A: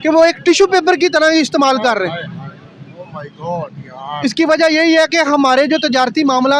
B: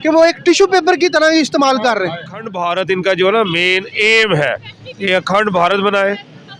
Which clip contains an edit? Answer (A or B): B